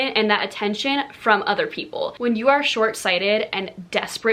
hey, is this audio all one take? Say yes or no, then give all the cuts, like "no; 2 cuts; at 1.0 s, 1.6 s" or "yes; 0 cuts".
no; 1 cut; at 2.1 s